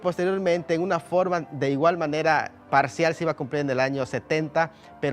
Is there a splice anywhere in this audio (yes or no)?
yes